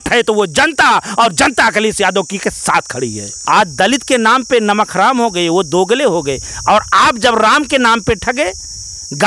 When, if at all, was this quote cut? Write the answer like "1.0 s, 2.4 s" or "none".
3.3 s